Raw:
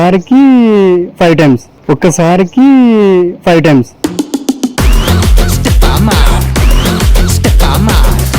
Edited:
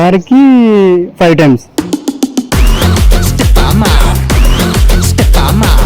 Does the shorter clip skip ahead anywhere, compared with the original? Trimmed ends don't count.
yes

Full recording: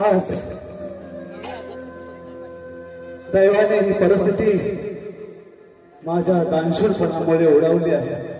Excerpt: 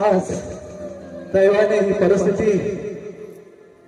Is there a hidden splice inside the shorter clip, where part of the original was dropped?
yes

